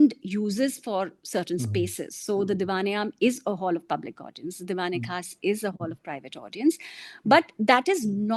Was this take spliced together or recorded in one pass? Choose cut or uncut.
uncut